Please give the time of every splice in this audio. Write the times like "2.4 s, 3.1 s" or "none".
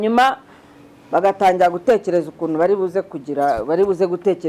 none